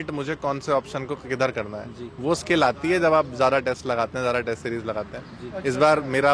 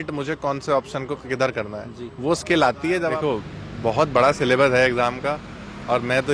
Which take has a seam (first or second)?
second